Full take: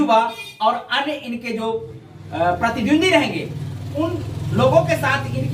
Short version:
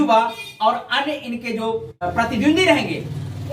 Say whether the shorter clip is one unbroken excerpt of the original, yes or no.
no